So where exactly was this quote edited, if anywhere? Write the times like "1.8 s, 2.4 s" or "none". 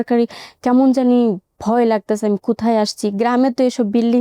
none

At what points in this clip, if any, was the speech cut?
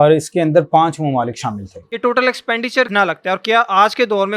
1.8 s, 2.9 s

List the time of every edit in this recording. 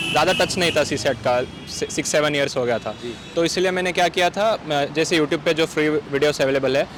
none

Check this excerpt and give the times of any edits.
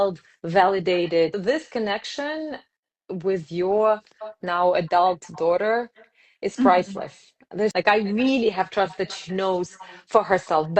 1.4 s, 7.7 s

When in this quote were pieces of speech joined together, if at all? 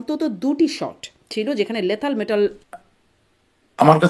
2.6 s

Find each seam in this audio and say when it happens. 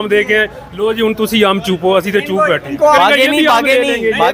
3.0 s

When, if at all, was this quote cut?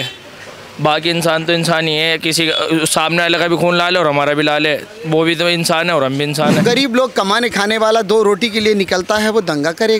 6.6 s

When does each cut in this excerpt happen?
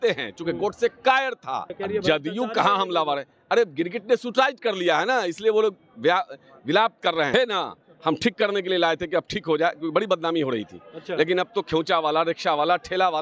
1.8 s, 7.3 s

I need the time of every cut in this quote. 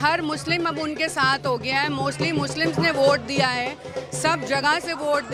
none

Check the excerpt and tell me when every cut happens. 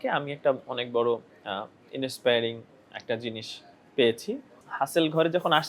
4.6 s

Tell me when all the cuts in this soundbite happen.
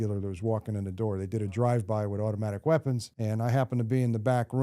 3.1 s

